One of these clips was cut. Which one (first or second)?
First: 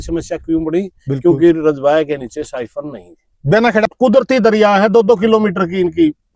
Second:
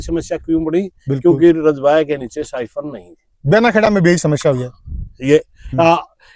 first